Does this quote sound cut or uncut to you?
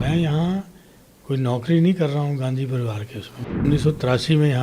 cut